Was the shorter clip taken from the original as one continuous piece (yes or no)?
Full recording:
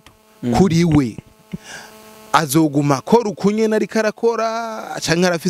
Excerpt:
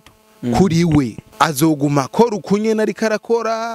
no